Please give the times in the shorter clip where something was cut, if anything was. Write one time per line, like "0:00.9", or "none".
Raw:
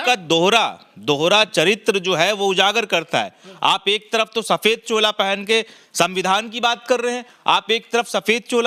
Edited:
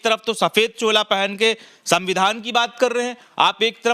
none